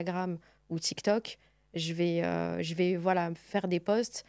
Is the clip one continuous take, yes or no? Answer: yes